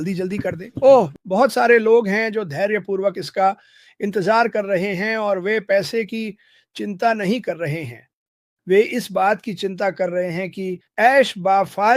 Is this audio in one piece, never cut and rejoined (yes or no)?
no